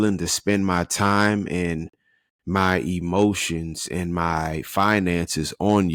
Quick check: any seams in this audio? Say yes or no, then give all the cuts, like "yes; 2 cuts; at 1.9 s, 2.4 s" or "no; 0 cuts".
no; 0 cuts